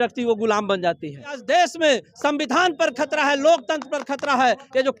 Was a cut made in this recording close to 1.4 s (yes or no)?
yes